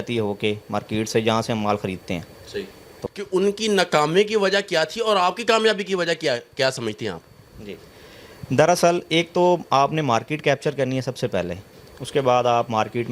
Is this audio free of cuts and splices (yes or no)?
no